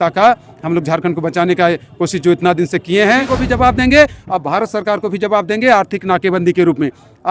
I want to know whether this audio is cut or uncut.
cut